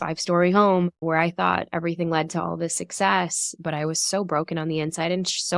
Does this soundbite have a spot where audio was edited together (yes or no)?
yes